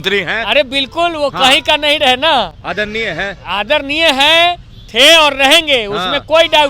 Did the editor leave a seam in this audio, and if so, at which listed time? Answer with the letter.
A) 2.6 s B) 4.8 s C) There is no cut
C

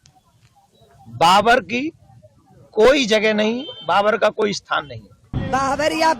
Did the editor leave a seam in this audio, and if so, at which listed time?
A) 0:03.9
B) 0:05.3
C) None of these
B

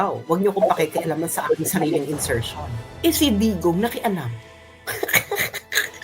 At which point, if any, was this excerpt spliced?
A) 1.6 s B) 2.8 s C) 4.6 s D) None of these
B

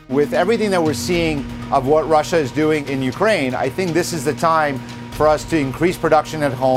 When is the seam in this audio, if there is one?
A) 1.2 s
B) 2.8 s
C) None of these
B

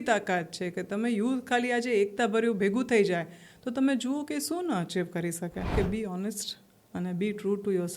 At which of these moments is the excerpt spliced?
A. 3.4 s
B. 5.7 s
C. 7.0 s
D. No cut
B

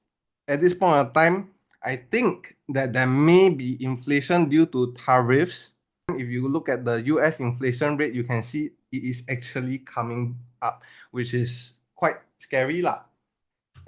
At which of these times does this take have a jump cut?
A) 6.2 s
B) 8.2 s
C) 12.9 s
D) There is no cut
A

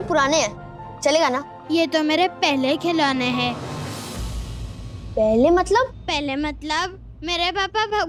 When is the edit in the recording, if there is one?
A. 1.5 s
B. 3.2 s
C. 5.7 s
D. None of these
A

